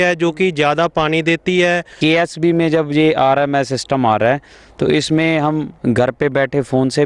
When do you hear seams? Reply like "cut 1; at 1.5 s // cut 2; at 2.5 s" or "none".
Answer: cut 1; at 1.9 s